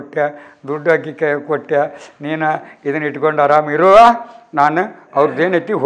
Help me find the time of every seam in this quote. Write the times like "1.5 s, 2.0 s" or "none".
none